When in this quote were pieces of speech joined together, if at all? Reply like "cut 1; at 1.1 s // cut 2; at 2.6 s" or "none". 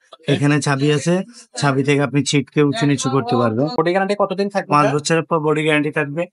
cut 1; at 3.7 s